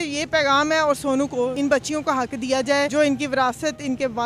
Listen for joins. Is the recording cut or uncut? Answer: cut